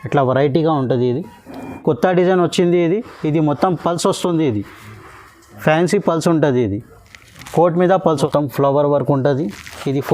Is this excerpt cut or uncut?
cut